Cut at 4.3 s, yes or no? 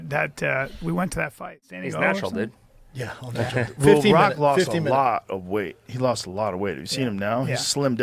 no